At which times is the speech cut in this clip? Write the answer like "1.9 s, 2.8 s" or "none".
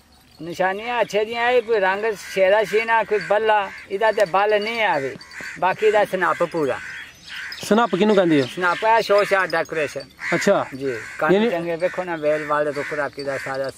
none

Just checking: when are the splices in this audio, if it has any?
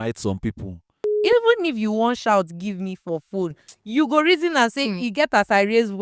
1.2 s

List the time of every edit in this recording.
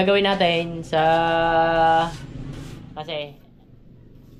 none

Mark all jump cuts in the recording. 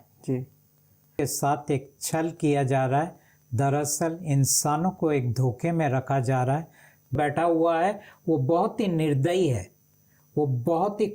1.1 s, 7.1 s

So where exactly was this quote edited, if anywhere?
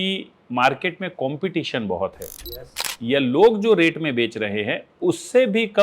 2.9 s

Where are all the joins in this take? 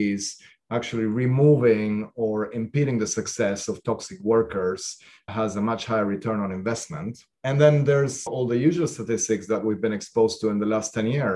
none

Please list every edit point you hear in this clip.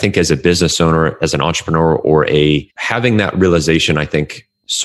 none

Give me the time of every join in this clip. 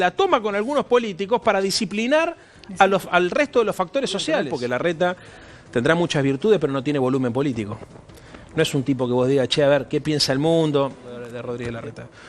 4.5 s, 11.3 s

